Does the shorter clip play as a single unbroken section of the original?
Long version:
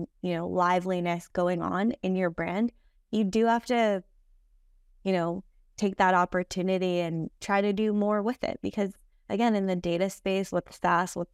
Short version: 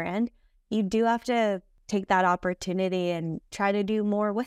no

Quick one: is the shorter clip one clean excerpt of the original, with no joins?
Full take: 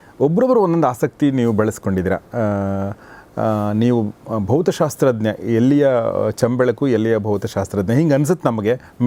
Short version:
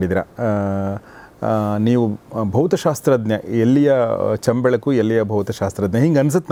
yes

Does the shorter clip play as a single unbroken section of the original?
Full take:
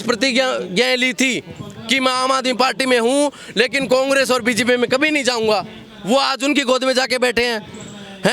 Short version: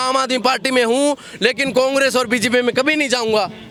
yes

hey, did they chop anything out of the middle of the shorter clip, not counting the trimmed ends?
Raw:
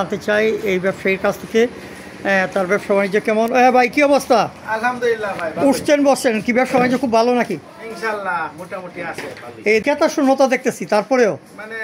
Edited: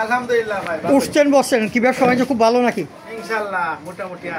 no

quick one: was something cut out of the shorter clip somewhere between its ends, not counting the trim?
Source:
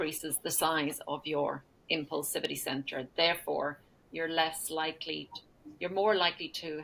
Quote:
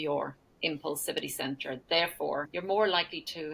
yes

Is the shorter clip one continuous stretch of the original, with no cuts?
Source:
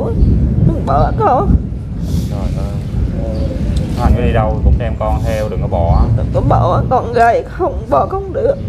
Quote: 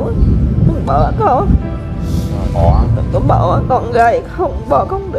no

